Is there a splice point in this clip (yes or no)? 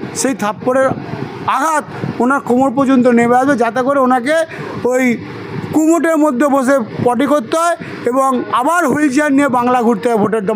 no